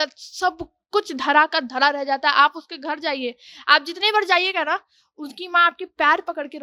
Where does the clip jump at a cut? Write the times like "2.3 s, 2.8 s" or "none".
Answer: none